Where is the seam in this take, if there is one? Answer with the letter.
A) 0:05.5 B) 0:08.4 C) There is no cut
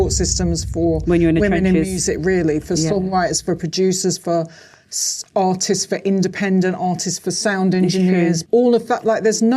B